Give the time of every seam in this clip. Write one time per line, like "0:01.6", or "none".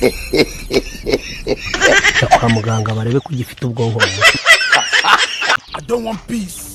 none